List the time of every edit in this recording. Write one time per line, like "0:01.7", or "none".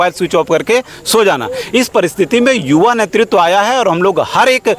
none